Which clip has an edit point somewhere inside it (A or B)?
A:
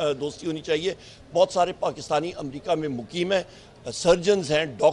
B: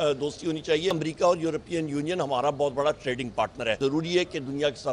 B